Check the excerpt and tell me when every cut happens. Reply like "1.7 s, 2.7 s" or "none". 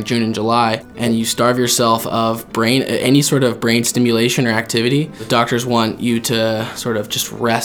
0.9 s, 5.2 s, 6.7 s